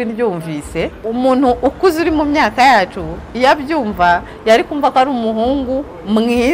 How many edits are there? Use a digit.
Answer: 1